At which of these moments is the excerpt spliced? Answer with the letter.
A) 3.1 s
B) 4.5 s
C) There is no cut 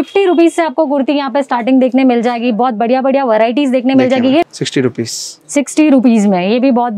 B